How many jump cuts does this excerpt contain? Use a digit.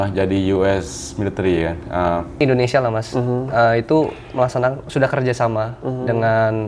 1